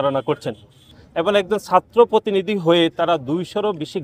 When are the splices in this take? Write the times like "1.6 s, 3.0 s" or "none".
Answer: 1.0 s